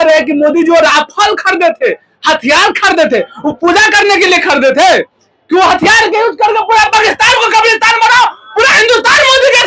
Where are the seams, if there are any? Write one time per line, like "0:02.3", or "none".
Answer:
none